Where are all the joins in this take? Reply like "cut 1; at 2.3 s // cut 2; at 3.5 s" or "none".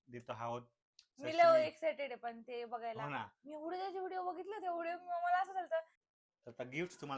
cut 1; at 6.0 s